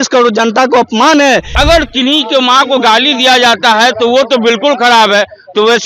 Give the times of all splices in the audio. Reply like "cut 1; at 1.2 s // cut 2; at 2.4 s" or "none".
cut 1; at 1.5 s